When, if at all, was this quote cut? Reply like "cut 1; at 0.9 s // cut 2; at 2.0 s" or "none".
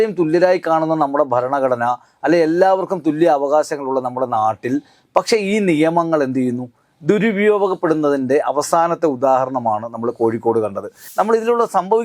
cut 1; at 11.0 s